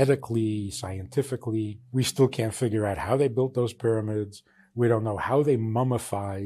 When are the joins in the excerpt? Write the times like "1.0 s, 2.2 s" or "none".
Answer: 1.8 s